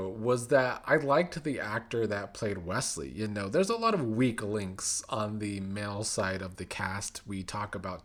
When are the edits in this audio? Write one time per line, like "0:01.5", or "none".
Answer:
none